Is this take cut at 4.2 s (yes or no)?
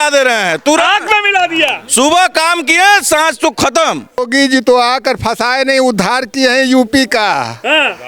yes